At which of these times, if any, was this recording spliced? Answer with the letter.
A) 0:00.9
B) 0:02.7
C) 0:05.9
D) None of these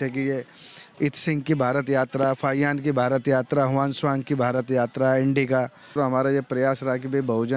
C